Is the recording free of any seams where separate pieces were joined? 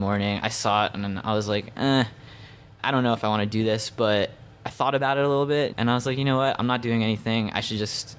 no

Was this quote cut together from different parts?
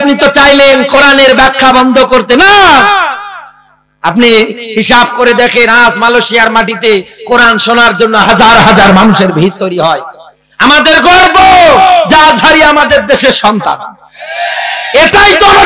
no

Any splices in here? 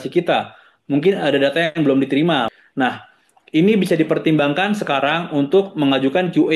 yes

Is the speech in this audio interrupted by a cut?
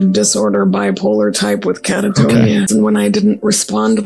yes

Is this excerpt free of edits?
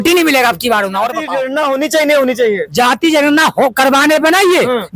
no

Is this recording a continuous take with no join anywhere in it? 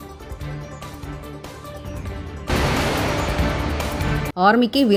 yes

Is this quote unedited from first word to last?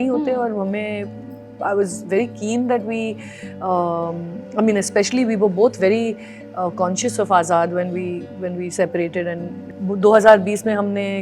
no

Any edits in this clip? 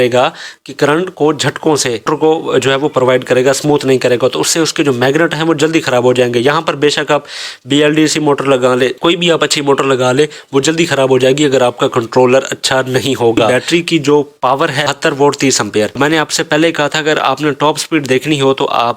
yes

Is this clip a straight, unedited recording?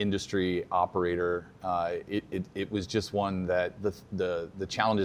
yes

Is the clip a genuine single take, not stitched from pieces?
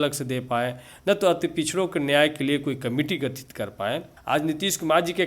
no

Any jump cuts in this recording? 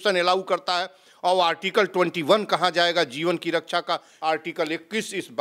yes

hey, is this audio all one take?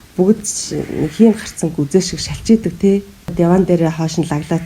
no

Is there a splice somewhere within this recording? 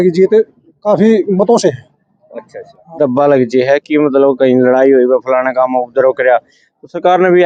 no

